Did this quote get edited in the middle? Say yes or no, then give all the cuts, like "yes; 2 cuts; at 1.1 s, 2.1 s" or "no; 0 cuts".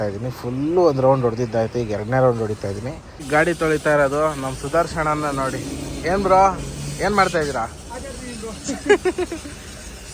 yes; 1 cut; at 3.2 s